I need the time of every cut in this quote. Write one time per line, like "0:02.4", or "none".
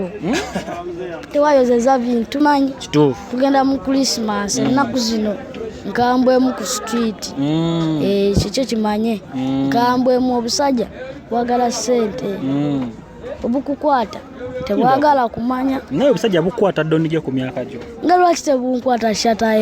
0:02.4